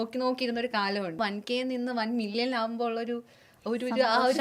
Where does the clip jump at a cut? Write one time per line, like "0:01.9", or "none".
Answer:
0:01.2